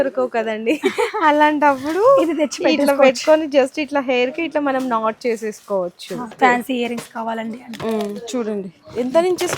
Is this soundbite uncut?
no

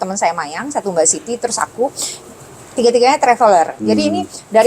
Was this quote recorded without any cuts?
yes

